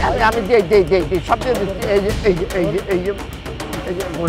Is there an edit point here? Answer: no; 0 cuts

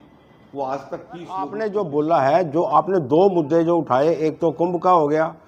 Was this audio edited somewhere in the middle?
yes; 1 cut; at 1.5 s

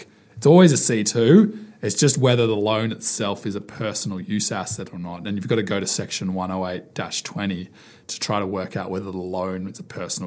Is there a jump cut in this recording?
no; 0 cuts

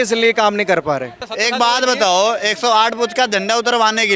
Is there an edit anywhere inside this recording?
yes; 1 cut; at 1.2 s

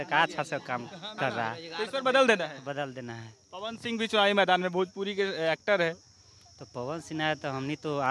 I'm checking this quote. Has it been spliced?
no; 0 cuts

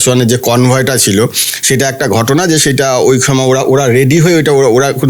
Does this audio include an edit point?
no; 0 cuts

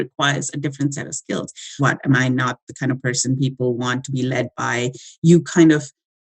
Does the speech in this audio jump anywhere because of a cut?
yes; 1 cut; at 1.7 s

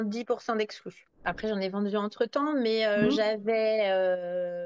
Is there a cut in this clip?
yes; 1 cut; at 1.2 s

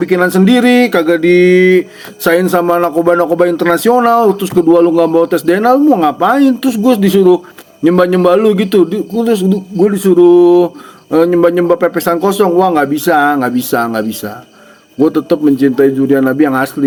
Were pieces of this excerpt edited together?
no; 0 cuts

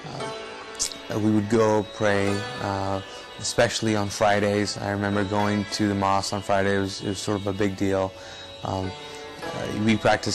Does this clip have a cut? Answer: yes; 1 cut; at 5.6 s

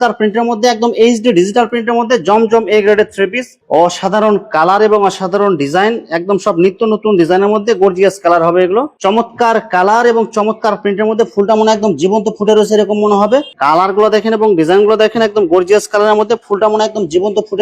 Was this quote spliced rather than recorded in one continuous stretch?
yes; 3 cuts; at 3.6 s, 8.9 s, 13.5 s

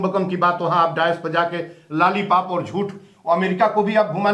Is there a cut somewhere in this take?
no; 0 cuts

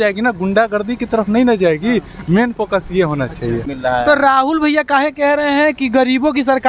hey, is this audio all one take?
no; 1 cut; at 3.7 s

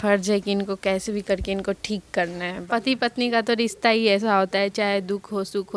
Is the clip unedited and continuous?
no; 1 cut; at 2.6 s

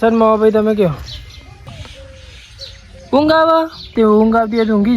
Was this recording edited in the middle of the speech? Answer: yes; 2 cuts; at 1.7 s, 3.8 s

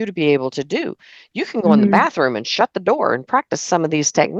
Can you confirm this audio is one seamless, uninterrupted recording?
yes; 0 cuts

